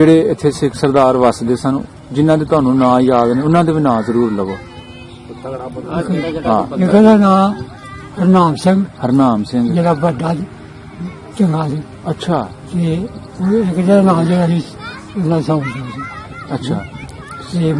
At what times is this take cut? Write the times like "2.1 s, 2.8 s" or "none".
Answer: none